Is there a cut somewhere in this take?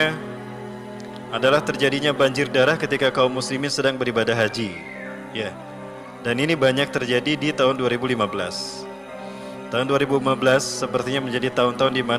no; 0 cuts

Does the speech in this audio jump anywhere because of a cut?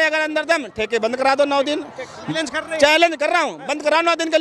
yes; 1 cut; at 2.2 s

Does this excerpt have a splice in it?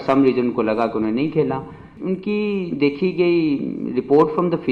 yes; 1 cut; at 1.9 s

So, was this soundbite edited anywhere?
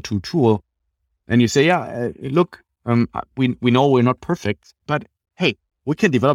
no; 0 cuts

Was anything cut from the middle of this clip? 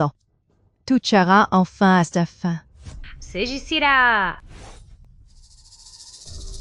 no; 0 cuts

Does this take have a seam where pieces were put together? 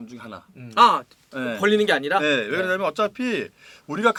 no; 0 cuts

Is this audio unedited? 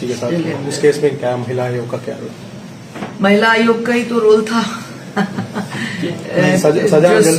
yes; 0 cuts

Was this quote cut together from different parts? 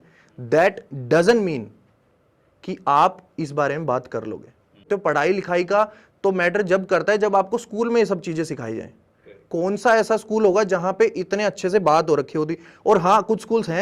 no; 0 cuts

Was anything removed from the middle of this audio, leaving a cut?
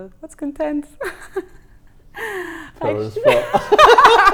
no; 0 cuts

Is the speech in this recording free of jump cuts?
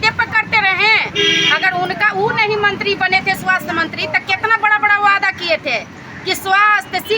yes; 0 cuts

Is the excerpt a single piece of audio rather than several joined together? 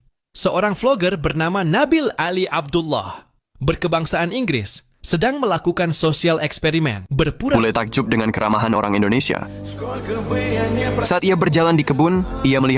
no; 1 cut; at 7.5 s

